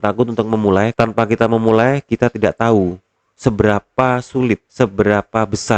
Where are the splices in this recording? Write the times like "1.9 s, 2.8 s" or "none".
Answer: 0.9 s, 4.8 s